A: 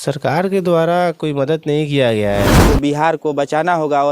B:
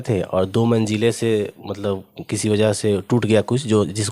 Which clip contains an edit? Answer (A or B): A